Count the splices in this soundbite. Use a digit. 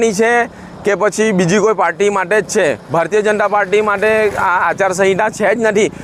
0